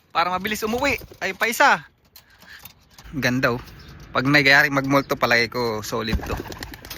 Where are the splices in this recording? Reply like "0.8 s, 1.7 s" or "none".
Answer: 3.0 s